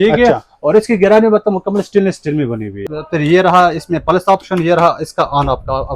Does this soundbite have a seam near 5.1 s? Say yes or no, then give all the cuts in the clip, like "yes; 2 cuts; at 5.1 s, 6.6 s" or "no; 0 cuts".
no; 1 cut; at 2.9 s